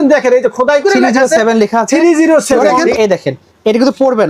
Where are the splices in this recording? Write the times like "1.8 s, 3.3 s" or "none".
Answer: 2.9 s